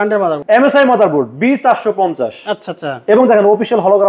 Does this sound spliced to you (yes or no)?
no